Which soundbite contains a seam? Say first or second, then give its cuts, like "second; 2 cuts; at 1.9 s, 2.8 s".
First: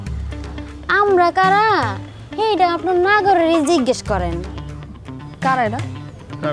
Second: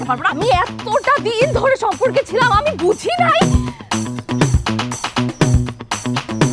second; 1 cut; at 3.4 s